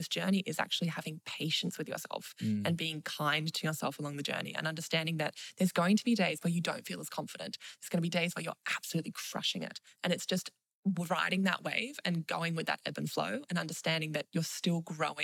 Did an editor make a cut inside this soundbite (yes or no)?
no